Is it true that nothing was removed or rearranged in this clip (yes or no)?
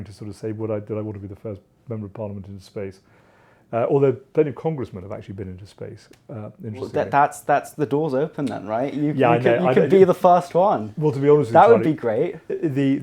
yes